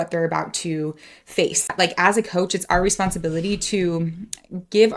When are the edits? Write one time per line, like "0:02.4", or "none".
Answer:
0:01.7